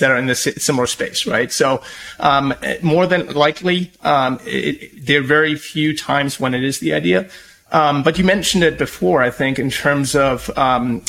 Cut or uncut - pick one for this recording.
uncut